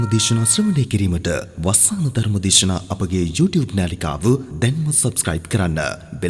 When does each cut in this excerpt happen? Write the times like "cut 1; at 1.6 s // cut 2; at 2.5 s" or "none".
none